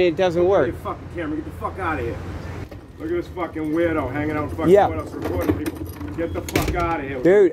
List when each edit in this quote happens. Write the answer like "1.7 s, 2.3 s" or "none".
2.7 s